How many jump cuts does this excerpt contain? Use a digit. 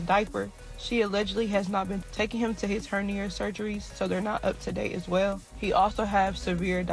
0